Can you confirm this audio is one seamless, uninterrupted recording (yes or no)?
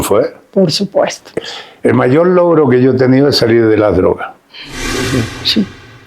no